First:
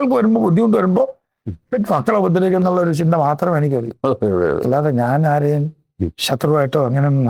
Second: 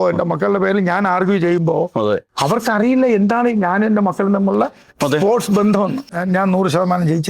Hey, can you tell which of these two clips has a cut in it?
second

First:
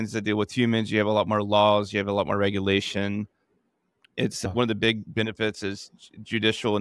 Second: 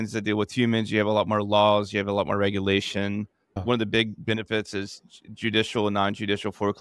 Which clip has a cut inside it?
second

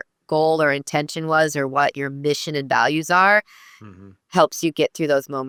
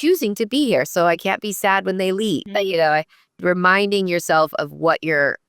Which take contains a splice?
second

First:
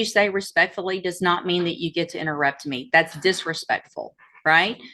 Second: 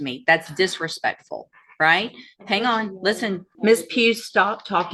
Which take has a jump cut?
second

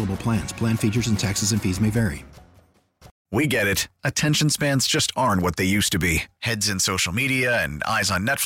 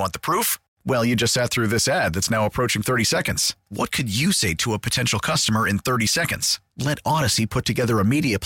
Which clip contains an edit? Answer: first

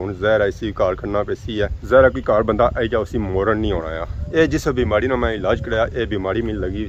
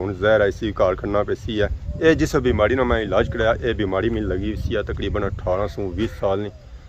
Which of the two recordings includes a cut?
second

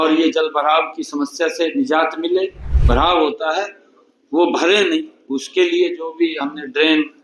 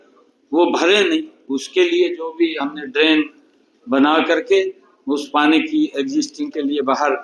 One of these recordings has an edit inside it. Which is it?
first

